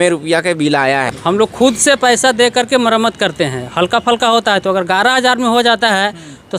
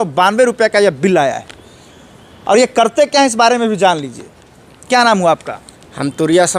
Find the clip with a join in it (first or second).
first